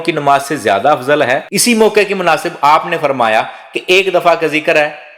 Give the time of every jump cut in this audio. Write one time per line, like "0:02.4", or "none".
0:01.5